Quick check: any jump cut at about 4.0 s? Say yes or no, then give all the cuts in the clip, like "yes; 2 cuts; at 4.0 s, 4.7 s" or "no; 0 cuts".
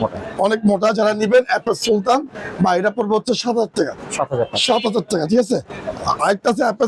no; 0 cuts